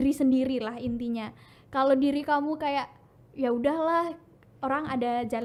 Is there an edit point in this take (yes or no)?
no